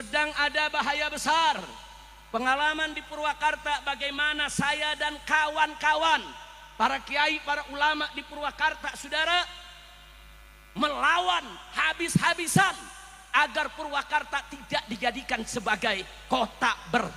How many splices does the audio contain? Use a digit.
0